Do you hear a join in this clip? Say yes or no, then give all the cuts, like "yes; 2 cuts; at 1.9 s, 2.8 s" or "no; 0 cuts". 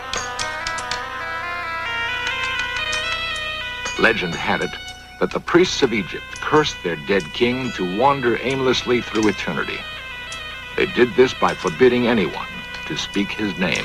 no; 0 cuts